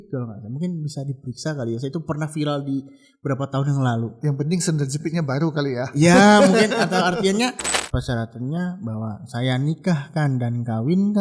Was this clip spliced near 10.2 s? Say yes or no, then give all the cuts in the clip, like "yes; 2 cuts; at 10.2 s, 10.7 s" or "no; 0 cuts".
no; 1 cut; at 7.7 s